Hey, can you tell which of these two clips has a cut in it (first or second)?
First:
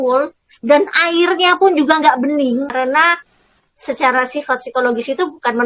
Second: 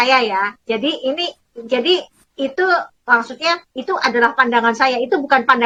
first